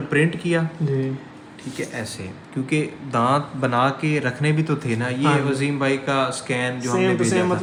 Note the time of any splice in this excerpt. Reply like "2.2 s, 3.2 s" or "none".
none

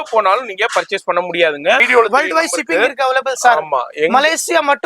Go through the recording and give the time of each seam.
1.8 s

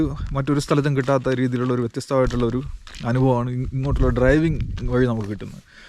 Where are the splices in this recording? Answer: none

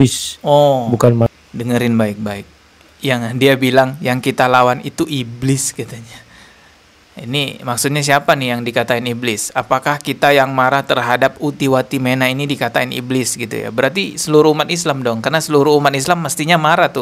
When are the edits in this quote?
none

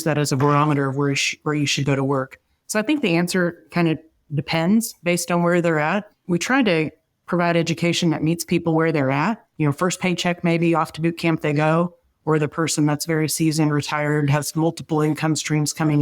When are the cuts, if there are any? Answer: 6.1 s, 9.5 s

